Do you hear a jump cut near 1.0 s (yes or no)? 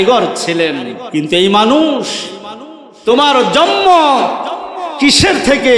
yes